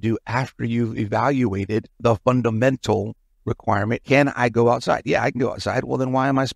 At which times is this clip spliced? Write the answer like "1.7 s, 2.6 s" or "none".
1.9 s, 4.0 s